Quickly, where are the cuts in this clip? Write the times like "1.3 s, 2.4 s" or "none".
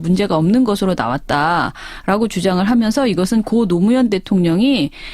3.7 s